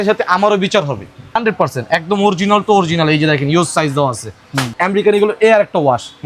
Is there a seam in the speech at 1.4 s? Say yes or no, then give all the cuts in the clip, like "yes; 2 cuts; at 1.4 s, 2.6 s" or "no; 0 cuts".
yes; 2 cuts; at 1.4 s, 4.7 s